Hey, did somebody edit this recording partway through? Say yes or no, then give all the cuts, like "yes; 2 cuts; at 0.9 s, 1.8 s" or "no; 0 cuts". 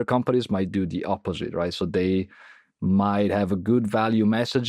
no; 0 cuts